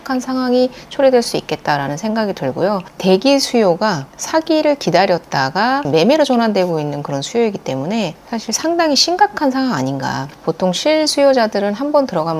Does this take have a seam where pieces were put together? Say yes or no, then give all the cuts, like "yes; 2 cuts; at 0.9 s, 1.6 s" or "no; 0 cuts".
yes; 3 cuts; at 2.9 s, 5.8 s, 10.3 s